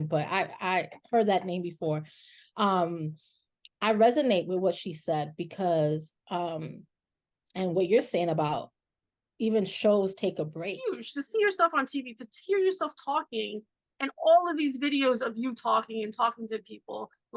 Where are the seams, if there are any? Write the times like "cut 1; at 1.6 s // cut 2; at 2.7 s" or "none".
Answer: cut 1; at 10.7 s